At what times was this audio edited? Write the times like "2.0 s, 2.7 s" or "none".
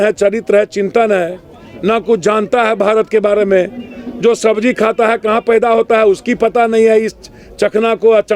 none